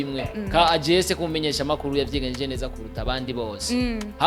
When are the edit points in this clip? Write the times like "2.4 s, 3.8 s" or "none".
none